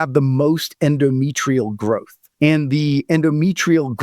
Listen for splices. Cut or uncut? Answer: cut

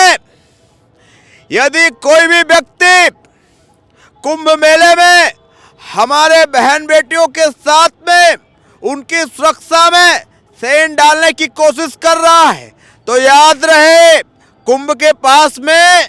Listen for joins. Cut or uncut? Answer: uncut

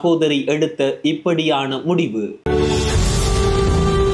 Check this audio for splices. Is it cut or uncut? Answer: cut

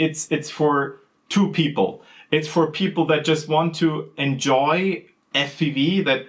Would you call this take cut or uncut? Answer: uncut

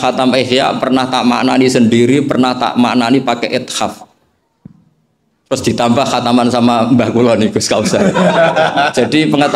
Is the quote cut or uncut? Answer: uncut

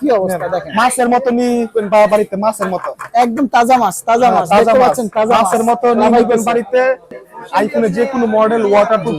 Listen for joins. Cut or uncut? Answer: cut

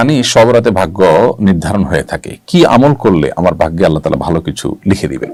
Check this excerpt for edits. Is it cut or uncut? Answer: uncut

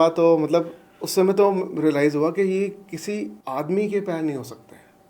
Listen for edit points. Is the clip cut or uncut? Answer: cut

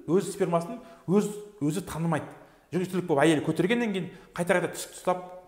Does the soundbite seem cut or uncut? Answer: uncut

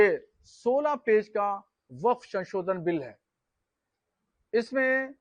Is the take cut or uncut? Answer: uncut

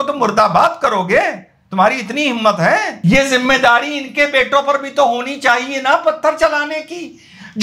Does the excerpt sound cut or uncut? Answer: cut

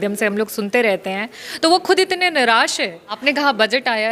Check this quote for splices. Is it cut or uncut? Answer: cut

